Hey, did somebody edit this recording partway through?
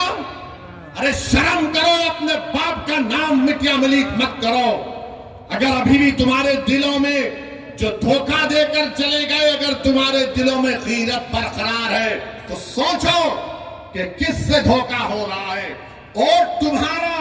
no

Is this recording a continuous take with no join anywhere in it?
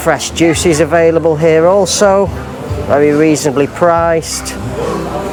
yes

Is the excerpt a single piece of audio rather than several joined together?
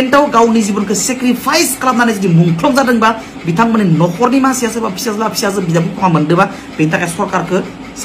yes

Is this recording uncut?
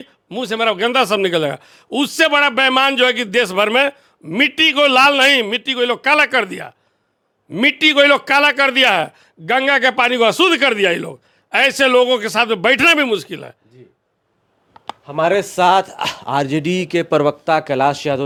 yes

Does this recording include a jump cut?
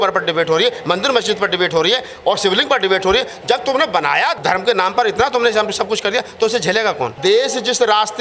yes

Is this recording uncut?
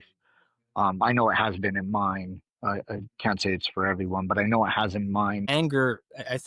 no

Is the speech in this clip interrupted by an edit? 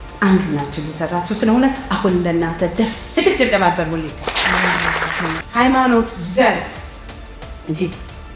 yes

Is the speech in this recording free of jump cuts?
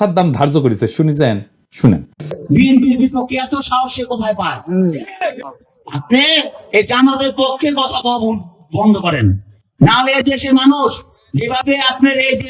no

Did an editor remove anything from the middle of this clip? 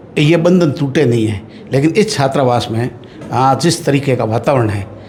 no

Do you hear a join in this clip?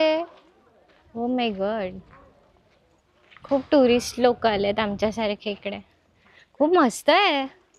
no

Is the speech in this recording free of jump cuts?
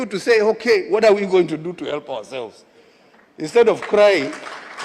no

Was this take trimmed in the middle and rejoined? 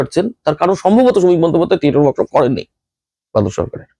no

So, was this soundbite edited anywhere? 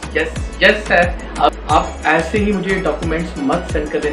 yes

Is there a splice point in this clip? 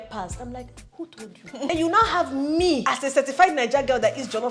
yes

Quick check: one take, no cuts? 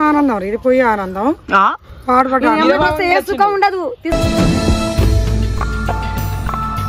yes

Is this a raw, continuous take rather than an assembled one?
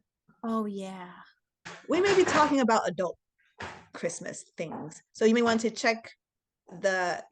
no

